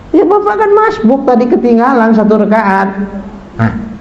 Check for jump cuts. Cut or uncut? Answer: uncut